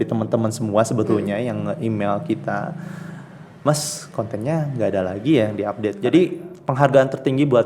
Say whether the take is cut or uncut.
cut